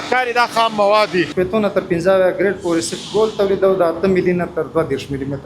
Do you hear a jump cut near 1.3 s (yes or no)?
yes